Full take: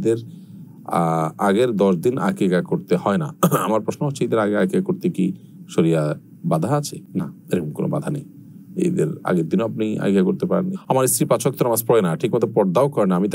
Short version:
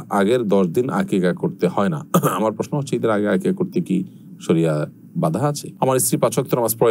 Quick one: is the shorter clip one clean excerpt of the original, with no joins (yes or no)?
no